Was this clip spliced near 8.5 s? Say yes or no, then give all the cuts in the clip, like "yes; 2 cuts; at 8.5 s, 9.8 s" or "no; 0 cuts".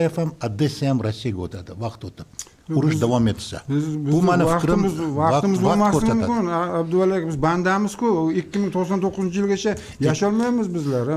no; 0 cuts